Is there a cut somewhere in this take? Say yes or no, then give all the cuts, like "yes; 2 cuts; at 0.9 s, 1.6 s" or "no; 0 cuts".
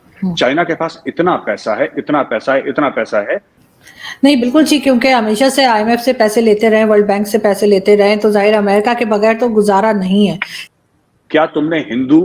yes; 2 cuts; at 3.6 s, 10.5 s